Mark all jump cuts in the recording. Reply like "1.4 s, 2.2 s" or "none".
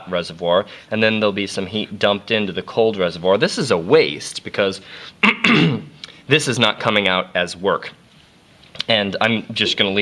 5.6 s

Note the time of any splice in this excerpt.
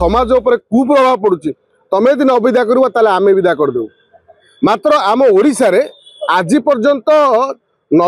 none

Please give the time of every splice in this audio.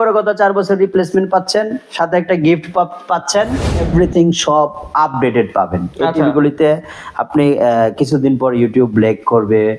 3.9 s

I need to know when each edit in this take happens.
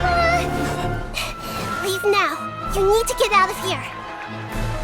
1.0 s

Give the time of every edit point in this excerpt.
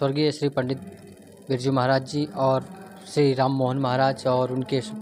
none

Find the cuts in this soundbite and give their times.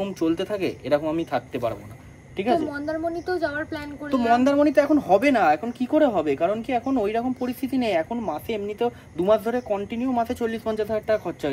none

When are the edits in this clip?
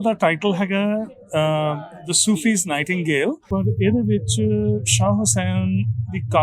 3.4 s

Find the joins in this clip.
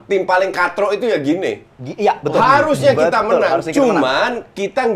none

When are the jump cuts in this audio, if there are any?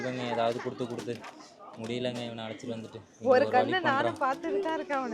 none

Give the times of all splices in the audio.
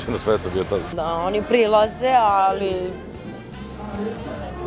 0.9 s

